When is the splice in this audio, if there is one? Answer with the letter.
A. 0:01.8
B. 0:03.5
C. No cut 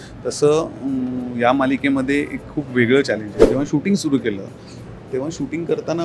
B